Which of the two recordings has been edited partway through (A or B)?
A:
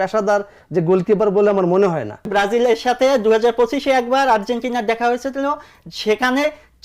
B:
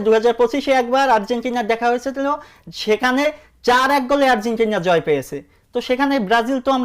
A